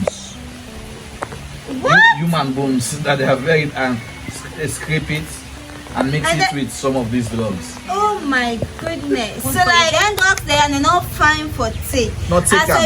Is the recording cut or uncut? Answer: cut